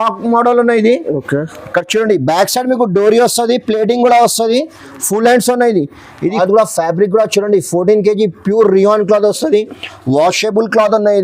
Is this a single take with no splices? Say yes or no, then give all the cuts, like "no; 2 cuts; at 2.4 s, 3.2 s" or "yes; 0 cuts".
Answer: no; 1 cut; at 6.2 s